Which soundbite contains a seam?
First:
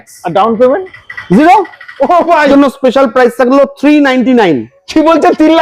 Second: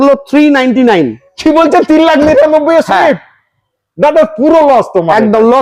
first; 1 cut; at 2.5 s

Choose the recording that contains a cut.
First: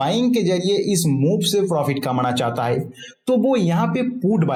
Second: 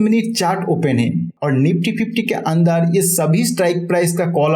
second; 1 cut; at 1.3 s

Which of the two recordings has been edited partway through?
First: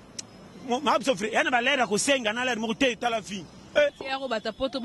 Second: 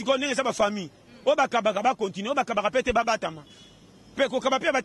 first; 1 cut; at 3.9 s

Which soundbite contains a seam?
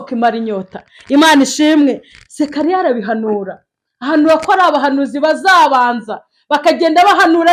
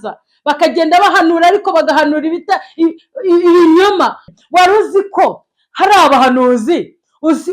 second; 1 cut; at 4.2 s

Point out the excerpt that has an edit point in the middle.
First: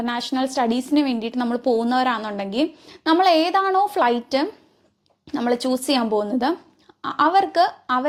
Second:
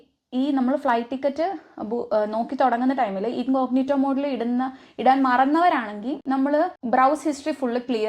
second; 1 cut; at 6.8 s

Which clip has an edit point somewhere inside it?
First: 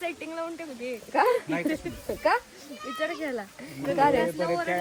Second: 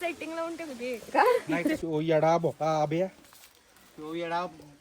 second; 1 cut; at 1.8 s

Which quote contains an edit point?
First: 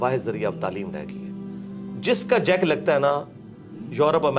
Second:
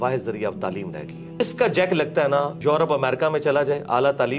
second; 2 cuts; at 1.4 s, 2.5 s

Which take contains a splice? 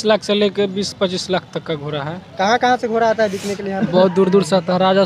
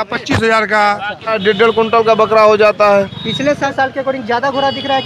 second; 2 cuts; at 1.4 s, 3.5 s

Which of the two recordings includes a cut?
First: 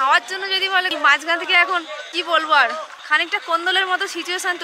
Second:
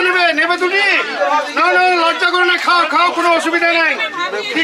first; 2 cuts; at 0.9 s, 2.9 s

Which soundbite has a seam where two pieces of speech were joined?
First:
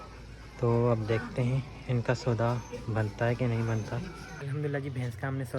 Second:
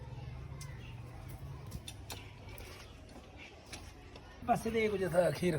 first; 1 cut; at 4.3 s

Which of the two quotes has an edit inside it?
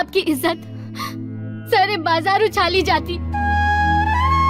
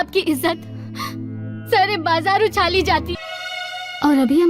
second; 1 cut; at 3.2 s

